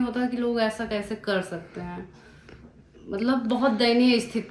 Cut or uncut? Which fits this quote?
uncut